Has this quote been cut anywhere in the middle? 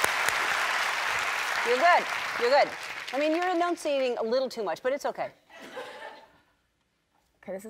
yes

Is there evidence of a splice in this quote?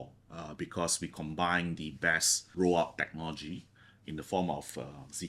yes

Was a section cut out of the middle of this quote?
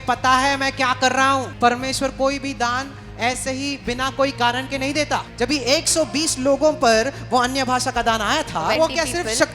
yes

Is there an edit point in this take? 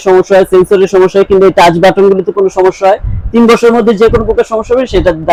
no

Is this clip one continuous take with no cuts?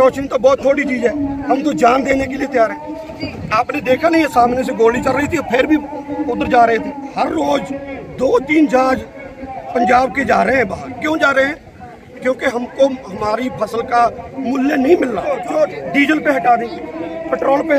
no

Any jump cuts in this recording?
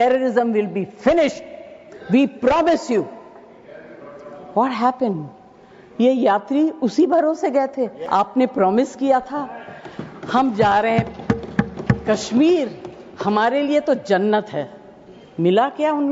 yes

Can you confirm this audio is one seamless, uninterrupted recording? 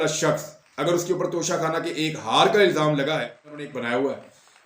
no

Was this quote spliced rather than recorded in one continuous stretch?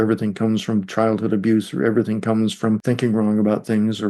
yes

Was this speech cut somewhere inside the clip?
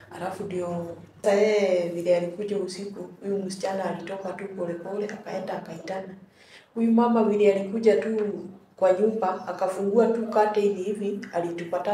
yes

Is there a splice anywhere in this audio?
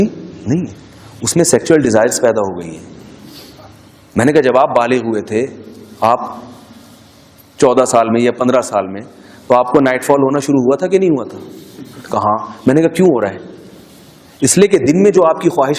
no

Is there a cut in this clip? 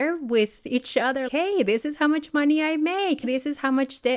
yes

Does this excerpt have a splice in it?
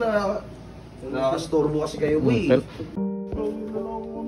yes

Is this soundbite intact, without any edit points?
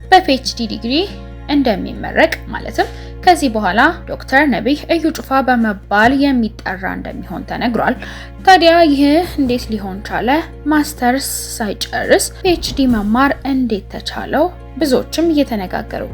yes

